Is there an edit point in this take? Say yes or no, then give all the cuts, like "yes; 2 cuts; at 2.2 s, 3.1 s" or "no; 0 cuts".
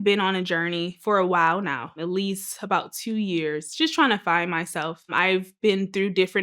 yes; 3 cuts; at 1.0 s, 2.0 s, 5.1 s